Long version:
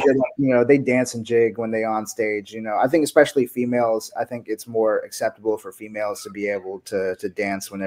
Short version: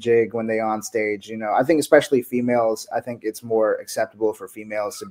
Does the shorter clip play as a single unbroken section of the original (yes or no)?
yes